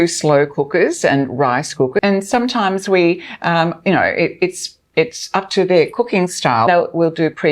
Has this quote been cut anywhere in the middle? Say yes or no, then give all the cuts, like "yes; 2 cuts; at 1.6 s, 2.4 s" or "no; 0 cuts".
yes; 2 cuts; at 2.0 s, 6.7 s